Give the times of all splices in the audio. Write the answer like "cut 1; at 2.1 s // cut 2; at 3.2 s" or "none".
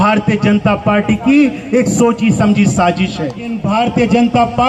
cut 1; at 3.6 s

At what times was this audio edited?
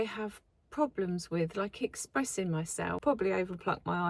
cut 1; at 3.0 s

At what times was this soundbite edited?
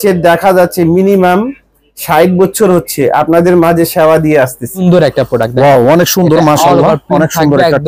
cut 1; at 4.8 s

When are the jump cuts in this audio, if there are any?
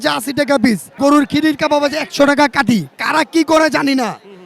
cut 1; at 1.0 s // cut 2; at 3.0 s

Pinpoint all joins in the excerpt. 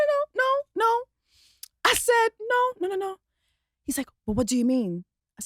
none

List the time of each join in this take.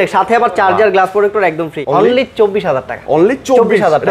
cut 1; at 1.8 s

